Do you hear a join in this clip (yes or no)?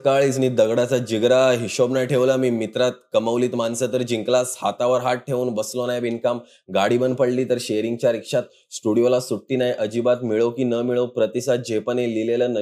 no